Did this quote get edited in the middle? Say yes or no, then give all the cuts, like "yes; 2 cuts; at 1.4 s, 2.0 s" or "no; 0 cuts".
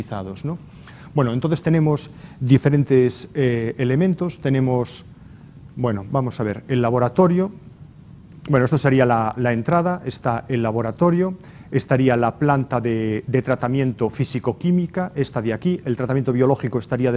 yes; 1 cut; at 13.2 s